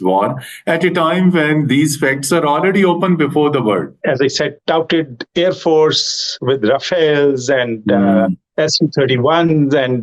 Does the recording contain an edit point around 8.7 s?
no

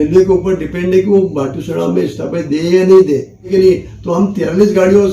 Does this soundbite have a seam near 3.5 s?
yes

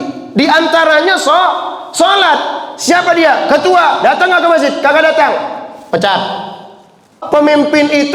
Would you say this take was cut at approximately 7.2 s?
yes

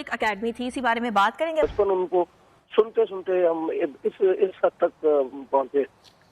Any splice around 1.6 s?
yes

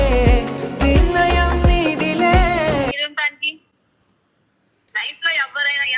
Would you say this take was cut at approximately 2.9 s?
yes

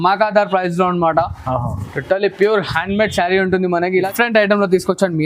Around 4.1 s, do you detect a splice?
yes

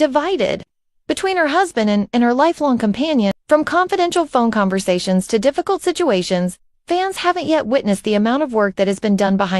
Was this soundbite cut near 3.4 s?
yes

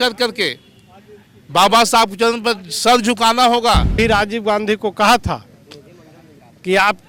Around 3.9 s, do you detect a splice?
yes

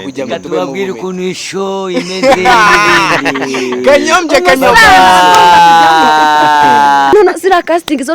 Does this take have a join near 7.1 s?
yes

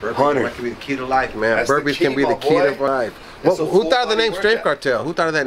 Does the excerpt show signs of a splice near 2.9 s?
yes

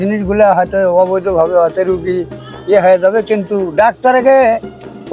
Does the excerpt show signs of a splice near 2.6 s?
no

